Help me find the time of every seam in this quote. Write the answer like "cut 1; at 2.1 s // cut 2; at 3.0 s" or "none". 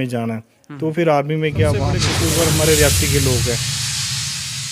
cut 1; at 2.0 s

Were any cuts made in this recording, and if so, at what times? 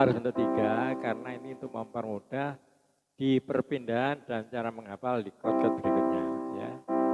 none

